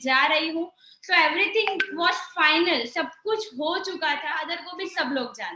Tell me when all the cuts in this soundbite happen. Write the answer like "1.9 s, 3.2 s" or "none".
4.6 s